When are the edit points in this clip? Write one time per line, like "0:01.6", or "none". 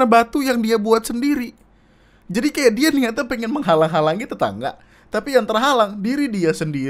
none